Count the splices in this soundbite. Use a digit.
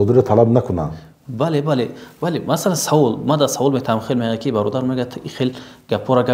0